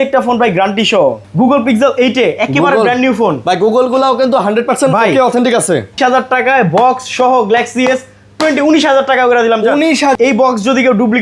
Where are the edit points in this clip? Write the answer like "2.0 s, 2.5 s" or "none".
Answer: 1.2 s, 6.0 s, 10.1 s